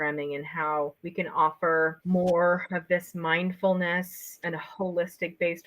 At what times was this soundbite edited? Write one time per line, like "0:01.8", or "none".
0:02.0
0:04.4